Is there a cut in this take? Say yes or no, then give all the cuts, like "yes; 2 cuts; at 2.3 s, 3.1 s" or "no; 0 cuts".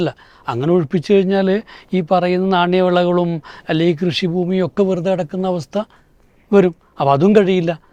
no; 0 cuts